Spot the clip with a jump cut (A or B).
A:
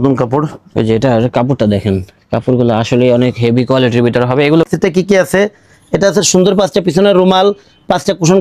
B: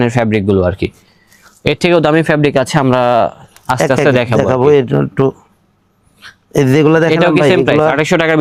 A